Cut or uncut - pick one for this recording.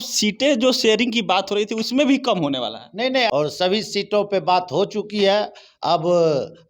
cut